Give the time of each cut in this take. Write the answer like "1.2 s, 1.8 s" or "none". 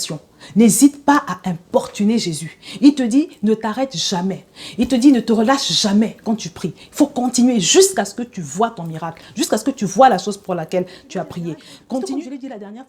11.7 s

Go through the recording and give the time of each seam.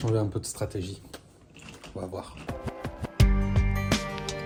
none

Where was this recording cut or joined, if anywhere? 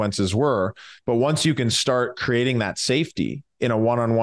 none

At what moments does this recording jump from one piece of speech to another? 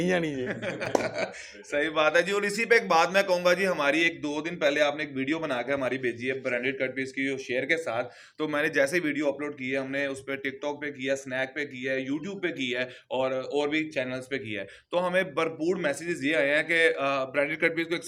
none

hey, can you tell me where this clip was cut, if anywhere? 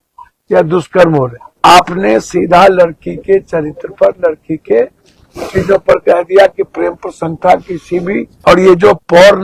1.4 s, 8.3 s

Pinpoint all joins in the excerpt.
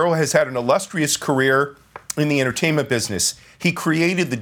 none

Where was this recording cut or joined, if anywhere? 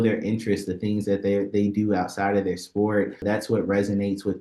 3.2 s

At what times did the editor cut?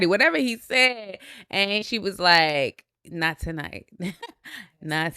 1.8 s

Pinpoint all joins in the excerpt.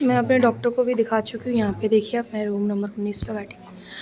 none

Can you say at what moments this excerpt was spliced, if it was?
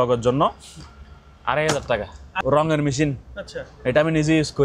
2.3 s

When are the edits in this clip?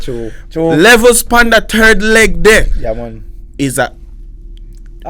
none

